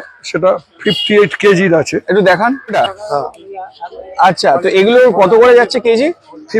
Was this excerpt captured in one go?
no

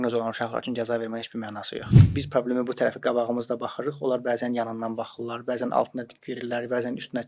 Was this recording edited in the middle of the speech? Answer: yes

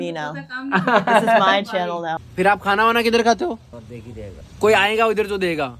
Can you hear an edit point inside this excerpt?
yes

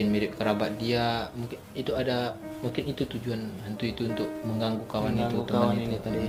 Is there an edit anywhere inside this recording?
no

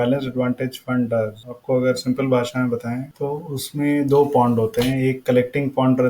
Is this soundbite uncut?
no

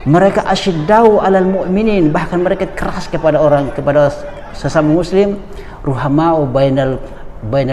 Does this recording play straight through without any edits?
yes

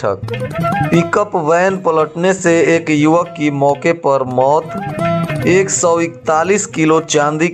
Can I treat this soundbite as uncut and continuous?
yes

